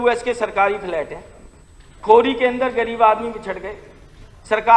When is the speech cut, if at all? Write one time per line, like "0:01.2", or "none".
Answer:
none